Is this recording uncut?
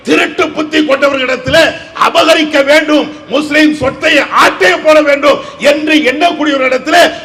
yes; 0 cuts

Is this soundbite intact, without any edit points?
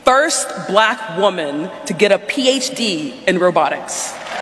yes; 0 cuts

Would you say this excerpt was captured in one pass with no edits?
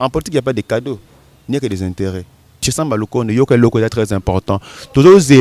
no; 1 cut; at 2.7 s

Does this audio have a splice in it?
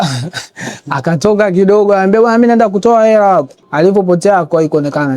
yes; 1 cut; at 3.6 s

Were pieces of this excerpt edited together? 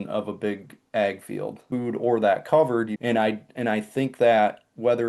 yes; 2 cuts; at 1.7 s, 2.9 s

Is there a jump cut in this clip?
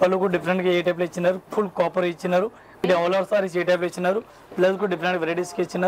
yes; 1 cut; at 2.7 s

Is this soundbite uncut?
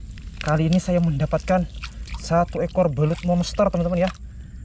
yes; 0 cuts

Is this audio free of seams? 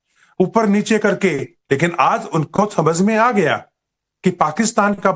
yes; 0 cuts

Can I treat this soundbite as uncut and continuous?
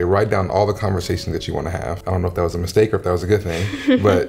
no; 1 cut; at 2.0 s

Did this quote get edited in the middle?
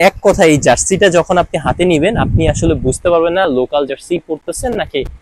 no; 0 cuts

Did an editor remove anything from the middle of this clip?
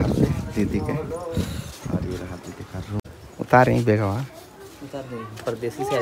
yes; 1 cut; at 3.0 s

